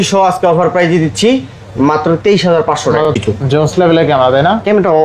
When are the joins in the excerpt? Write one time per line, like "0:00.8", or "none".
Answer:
0:03.1